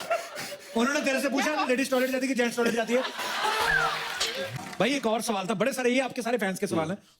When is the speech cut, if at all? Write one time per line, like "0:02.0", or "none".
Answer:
0:04.5